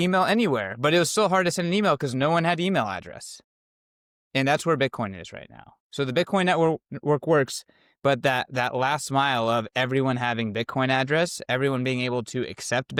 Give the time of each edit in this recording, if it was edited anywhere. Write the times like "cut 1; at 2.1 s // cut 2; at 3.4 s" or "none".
none